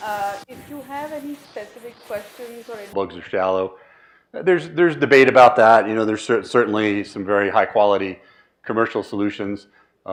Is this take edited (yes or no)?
no